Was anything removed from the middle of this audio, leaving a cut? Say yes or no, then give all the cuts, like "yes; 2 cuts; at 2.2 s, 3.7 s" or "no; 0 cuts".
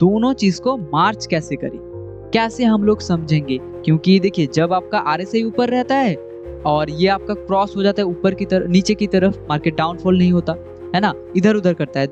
no; 0 cuts